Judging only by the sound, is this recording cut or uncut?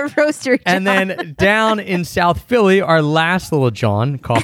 cut